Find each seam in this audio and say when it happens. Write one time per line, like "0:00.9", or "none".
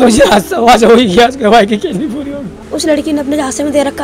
0:02.6